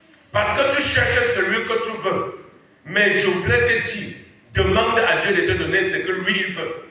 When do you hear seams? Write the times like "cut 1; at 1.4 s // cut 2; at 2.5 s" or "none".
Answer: none